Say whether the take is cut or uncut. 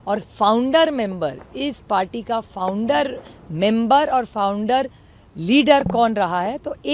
uncut